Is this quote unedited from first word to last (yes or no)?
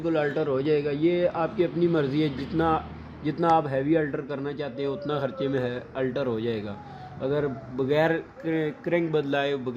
yes